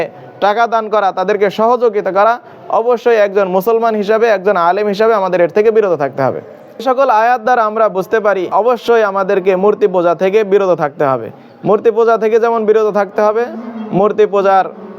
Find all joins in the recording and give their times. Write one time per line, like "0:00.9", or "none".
0:06.8
0:08.5